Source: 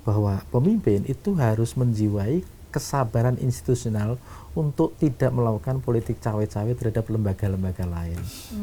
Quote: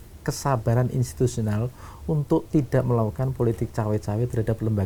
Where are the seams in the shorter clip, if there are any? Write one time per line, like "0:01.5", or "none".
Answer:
none